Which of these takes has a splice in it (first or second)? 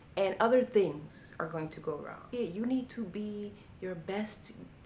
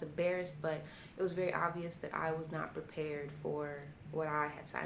first